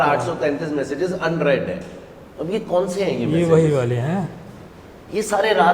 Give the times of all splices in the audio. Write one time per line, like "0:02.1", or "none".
none